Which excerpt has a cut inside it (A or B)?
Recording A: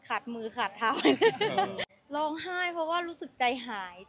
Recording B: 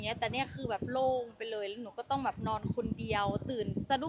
A